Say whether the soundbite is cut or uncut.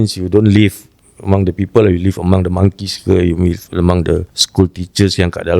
cut